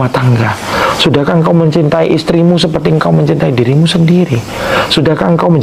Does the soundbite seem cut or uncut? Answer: uncut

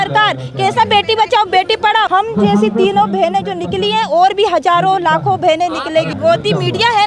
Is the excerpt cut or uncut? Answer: cut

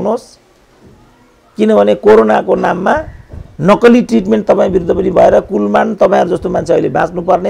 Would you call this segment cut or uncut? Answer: uncut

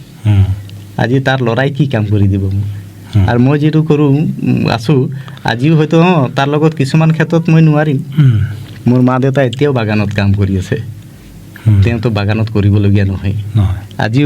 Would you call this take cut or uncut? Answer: uncut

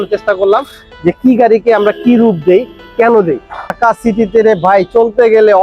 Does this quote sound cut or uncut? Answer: cut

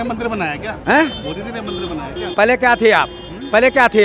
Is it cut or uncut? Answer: uncut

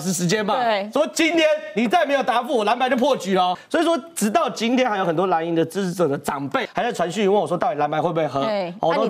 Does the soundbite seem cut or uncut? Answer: cut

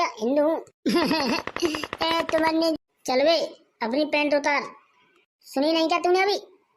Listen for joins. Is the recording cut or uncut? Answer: cut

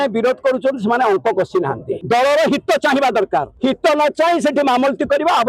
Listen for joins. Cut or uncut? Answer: cut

